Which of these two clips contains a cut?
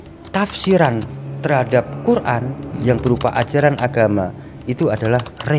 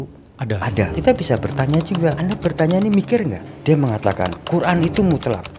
second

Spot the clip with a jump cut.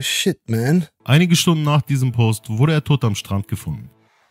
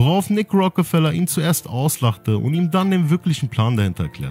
first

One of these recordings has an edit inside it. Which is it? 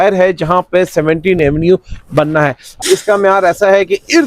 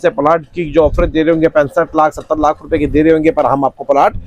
first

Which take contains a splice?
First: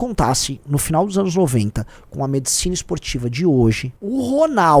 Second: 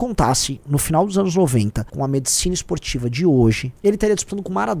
second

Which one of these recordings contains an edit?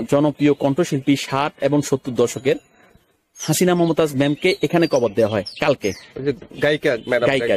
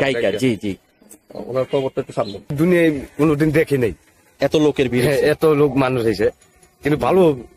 second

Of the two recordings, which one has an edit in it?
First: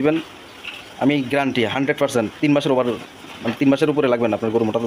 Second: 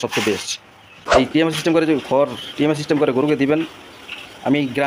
second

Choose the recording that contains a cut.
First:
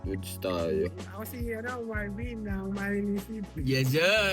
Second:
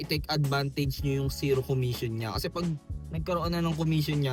first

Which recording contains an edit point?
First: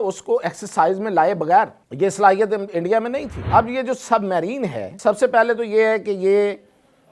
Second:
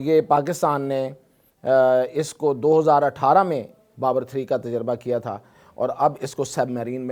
first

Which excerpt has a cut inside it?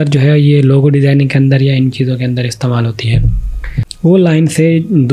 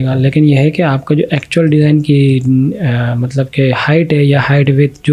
first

